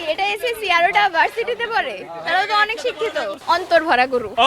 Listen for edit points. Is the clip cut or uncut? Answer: cut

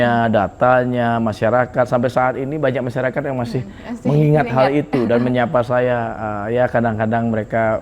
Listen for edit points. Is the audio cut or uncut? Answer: uncut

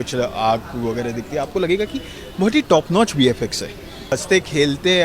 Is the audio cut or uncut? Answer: cut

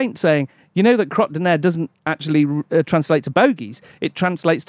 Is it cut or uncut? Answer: uncut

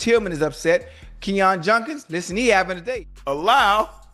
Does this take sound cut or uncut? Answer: cut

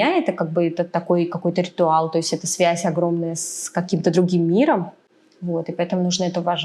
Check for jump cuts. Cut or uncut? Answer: uncut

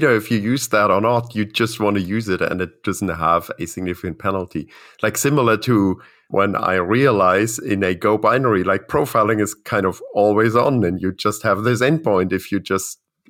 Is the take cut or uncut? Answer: uncut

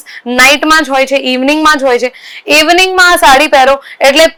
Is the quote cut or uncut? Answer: uncut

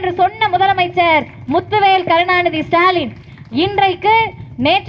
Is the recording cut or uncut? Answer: uncut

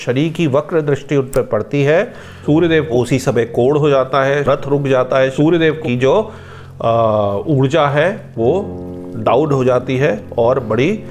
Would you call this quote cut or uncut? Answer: cut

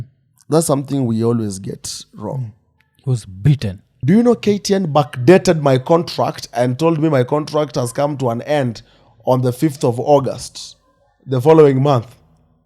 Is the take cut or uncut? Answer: cut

